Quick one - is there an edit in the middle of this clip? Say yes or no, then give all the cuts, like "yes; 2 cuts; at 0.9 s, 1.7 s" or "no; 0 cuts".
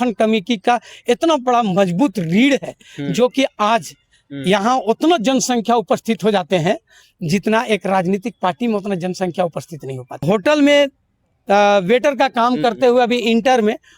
yes; 1 cut; at 10.2 s